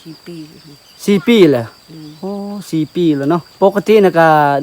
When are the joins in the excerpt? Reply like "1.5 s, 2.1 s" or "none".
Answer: 3.5 s